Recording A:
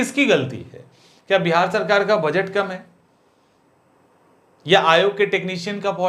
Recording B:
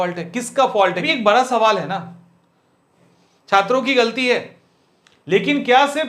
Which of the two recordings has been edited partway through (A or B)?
B